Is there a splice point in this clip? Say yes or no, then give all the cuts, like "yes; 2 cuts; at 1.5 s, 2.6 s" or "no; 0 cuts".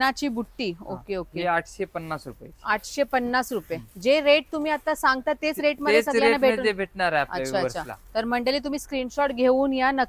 no; 0 cuts